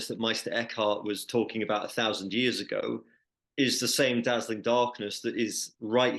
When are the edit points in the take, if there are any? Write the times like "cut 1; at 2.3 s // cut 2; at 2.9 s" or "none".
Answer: none

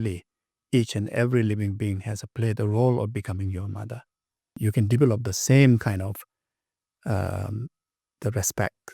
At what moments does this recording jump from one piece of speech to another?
cut 1; at 4.5 s

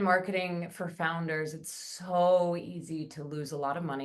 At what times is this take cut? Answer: none

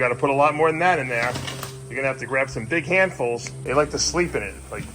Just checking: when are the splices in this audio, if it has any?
cut 1; at 3.5 s

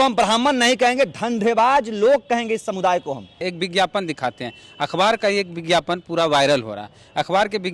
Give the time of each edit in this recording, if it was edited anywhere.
cut 1; at 3.4 s

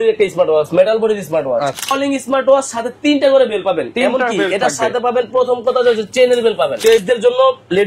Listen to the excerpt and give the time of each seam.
cut 1; at 1.8 s // cut 2; at 7.0 s

